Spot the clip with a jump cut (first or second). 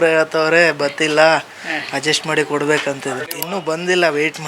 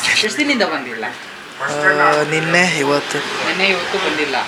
first